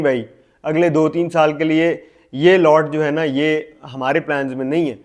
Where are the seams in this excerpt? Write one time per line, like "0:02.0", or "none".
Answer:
none